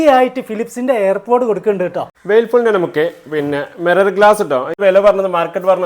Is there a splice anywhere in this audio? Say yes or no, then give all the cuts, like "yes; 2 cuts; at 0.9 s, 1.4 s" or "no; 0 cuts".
yes; 2 cuts; at 2.1 s, 4.7 s